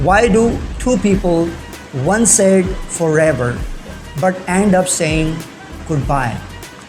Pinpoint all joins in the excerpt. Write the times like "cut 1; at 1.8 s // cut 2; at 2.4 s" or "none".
none